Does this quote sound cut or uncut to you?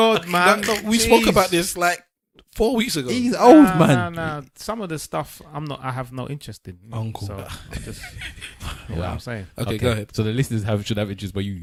uncut